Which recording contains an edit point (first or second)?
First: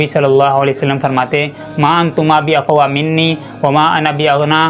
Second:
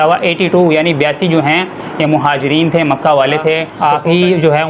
second